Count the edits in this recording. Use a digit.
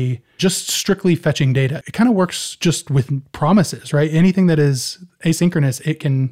1